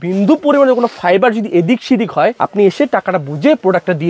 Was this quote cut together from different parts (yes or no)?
yes